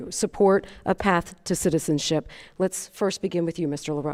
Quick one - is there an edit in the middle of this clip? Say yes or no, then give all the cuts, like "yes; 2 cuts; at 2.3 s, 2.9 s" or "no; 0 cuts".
no; 0 cuts